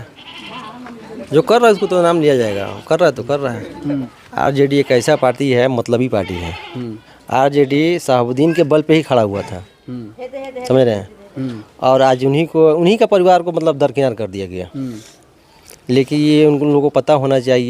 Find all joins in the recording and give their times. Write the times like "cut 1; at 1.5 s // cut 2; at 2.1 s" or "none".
cut 1; at 4.1 s